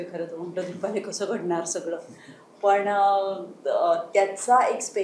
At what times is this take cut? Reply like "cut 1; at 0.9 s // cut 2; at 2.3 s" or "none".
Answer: none